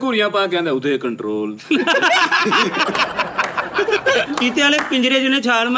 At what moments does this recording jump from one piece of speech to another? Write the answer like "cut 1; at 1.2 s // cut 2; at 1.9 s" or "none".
cut 1; at 4.3 s